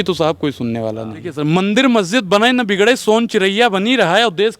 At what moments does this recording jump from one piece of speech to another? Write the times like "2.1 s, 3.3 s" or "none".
1.2 s

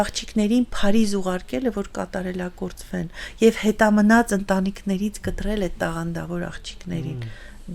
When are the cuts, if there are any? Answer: none

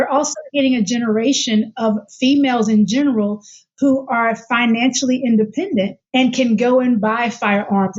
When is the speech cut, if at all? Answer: 6.0 s

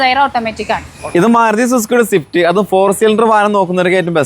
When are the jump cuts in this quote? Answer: 0.9 s

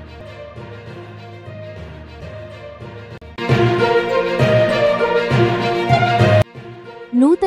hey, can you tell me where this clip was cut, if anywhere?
none

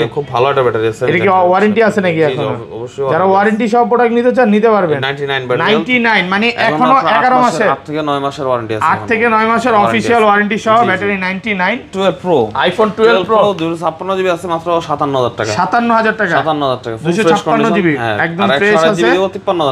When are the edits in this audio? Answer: 11.8 s

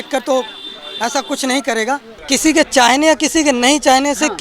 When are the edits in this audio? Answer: 2.1 s

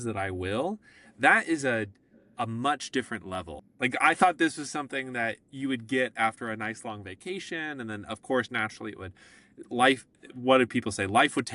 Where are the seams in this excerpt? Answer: 3.6 s

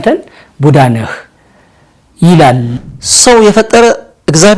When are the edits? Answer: 2.7 s

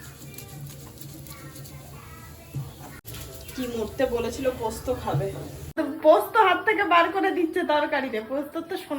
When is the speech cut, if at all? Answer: 3.0 s, 5.8 s

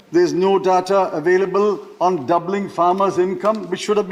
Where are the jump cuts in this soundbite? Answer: none

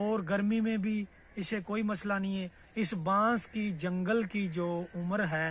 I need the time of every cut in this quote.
2.6 s

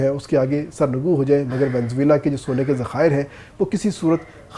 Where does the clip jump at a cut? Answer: none

